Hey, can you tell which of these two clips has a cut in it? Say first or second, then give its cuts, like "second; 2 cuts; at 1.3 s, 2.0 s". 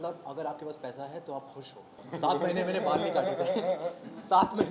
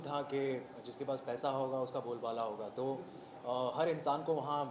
first; 1 cut; at 2.0 s